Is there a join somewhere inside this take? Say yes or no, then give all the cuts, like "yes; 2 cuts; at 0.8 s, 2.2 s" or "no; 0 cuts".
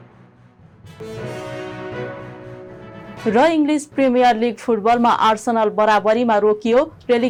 no; 0 cuts